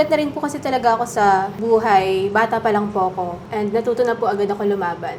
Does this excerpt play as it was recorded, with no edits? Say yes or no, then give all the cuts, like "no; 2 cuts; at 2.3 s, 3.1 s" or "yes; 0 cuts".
yes; 0 cuts